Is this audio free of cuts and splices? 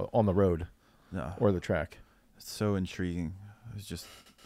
yes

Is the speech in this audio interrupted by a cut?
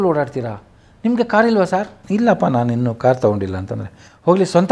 yes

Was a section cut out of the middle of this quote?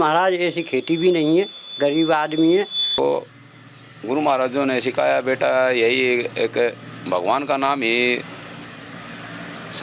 yes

